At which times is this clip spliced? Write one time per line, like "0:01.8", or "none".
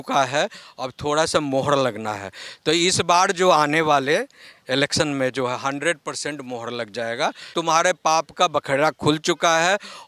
0:07.5